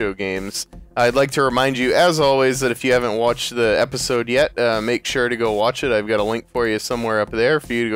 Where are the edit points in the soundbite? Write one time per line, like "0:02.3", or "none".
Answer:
none